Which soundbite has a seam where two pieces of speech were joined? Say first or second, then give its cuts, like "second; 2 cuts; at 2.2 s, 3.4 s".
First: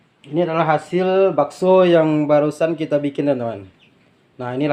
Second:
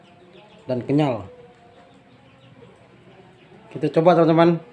second; 1 cut; at 2.9 s